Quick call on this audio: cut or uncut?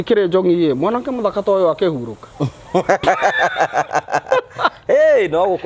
uncut